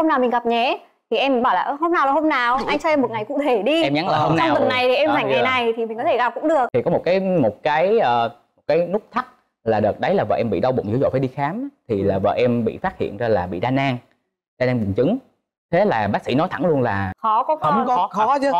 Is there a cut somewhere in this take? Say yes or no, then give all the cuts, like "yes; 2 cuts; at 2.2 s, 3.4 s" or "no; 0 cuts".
yes; 1 cut; at 6.7 s